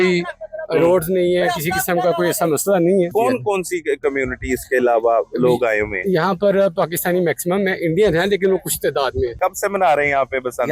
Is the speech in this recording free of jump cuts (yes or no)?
no